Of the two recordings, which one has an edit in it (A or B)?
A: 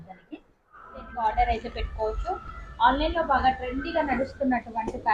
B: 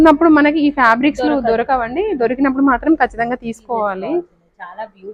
A